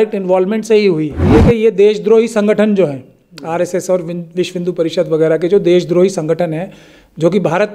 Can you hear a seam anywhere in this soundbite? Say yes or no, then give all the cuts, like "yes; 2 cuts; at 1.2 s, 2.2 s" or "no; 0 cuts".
yes; 1 cut; at 1.2 s